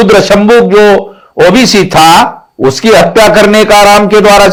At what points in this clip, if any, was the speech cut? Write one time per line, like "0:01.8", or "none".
none